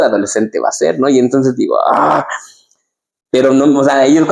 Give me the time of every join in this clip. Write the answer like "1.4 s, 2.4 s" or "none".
none